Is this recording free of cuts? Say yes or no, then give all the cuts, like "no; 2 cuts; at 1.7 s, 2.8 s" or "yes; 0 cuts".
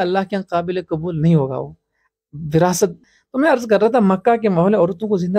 no; 1 cut; at 3.1 s